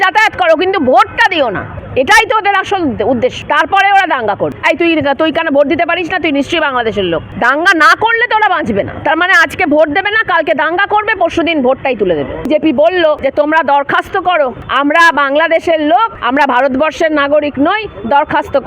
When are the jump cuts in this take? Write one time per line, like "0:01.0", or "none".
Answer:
0:01.7
0:03.4
0:04.6
0:07.3
0:12.5
0:13.2
0:14.6
0:16.2